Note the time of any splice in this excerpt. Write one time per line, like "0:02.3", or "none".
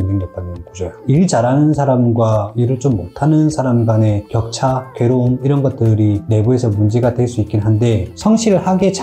0:08.1